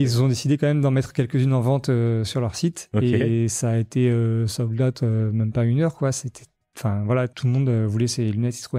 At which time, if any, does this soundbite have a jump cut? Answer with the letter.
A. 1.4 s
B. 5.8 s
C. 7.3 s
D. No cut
C